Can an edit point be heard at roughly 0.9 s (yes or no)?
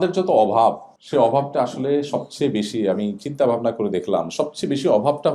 yes